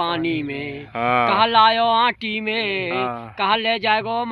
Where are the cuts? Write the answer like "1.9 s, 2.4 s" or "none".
none